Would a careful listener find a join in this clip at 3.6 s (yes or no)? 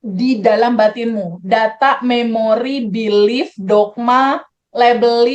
no